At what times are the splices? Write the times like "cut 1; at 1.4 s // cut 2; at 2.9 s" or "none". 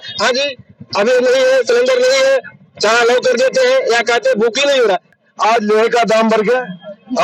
cut 1; at 5.1 s